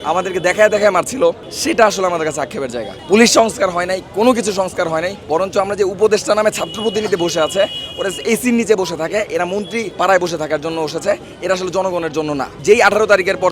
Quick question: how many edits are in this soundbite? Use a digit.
5